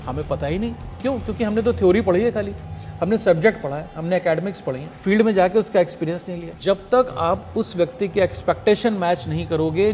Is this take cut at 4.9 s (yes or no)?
yes